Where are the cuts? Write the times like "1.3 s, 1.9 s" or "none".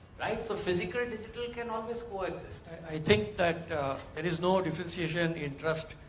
2.8 s